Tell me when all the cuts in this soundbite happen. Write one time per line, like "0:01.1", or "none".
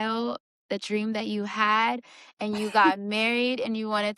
none